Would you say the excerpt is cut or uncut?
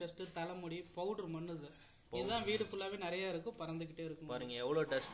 uncut